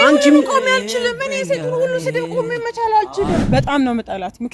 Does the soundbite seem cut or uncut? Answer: cut